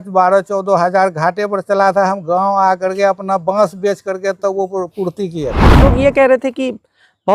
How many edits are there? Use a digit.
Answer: 1